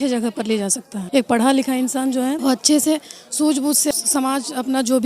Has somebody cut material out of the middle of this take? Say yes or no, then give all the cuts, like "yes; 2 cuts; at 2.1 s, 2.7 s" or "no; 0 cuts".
yes; 3 cuts; at 0.9 s, 2.4 s, 3.9 s